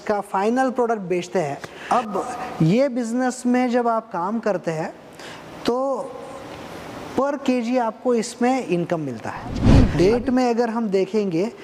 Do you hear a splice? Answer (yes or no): yes